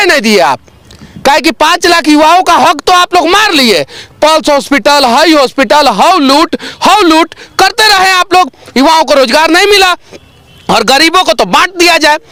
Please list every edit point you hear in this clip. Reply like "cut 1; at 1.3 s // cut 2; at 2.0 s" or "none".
none